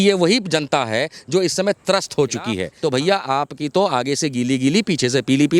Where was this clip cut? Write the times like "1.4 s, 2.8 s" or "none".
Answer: 2.7 s